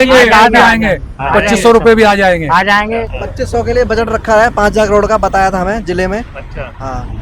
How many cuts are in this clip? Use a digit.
1